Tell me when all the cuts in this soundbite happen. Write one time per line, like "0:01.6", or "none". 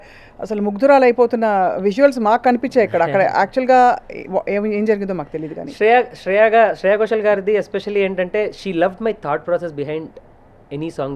none